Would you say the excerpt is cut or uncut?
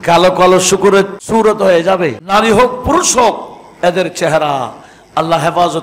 cut